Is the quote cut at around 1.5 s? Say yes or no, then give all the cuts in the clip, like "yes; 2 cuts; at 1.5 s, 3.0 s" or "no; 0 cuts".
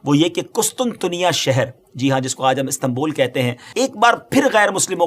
no; 1 cut; at 3.6 s